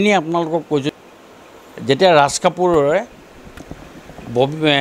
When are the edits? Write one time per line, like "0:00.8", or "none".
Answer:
0:00.9

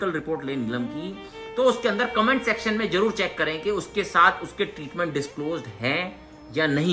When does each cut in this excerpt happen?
none

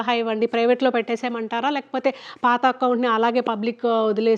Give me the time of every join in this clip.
none

